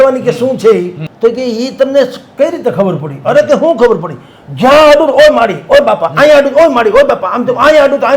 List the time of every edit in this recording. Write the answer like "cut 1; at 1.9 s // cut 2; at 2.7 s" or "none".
cut 1; at 1.0 s